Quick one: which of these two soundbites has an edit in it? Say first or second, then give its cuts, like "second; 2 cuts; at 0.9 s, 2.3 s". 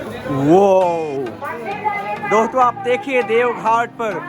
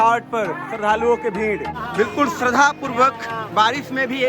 second; 1 cut; at 1.8 s